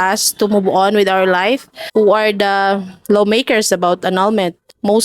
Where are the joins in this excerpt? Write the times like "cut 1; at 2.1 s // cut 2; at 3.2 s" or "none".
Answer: cut 1; at 1.7 s